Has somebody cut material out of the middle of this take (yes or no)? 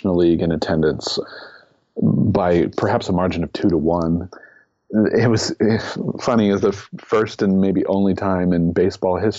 yes